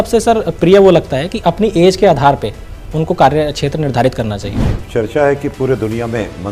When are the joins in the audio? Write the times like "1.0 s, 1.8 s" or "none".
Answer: 4.8 s